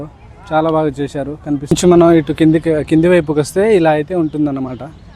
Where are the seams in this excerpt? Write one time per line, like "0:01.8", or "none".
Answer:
0:01.6